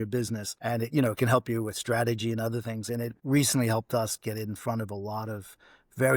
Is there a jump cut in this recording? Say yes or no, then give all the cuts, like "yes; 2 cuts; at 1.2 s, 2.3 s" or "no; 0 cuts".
no; 0 cuts